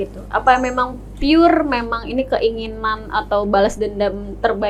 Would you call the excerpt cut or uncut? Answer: uncut